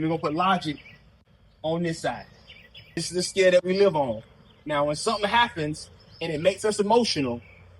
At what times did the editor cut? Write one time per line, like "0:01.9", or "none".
0:03.0